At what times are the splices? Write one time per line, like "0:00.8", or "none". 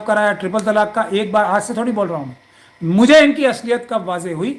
none